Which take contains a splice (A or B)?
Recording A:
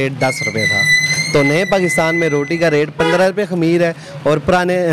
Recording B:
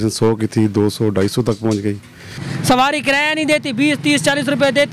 B